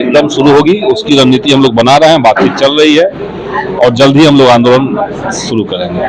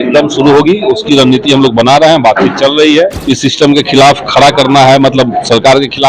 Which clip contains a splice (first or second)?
second